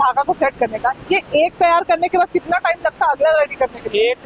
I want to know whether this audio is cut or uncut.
uncut